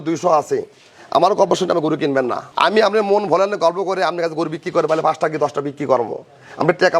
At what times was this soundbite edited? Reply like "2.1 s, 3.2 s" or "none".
2.4 s